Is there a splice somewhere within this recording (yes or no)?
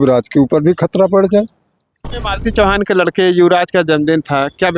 yes